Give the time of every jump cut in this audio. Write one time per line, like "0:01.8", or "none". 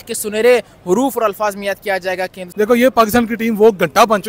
0:02.4